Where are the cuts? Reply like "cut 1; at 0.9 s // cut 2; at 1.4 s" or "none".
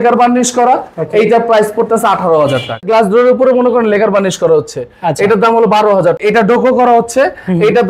cut 1; at 2.9 s // cut 2; at 6.2 s